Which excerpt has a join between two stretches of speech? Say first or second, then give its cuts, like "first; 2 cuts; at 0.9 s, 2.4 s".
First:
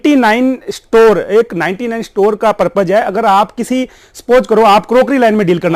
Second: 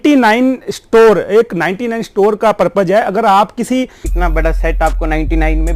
second; 1 cut; at 4.1 s